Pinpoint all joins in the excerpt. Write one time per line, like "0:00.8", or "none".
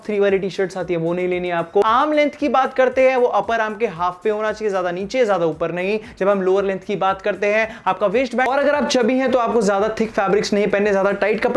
0:01.8
0:08.5